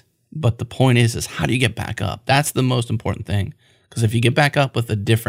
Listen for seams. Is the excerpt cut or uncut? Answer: uncut